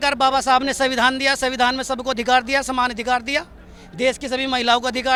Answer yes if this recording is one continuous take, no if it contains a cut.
yes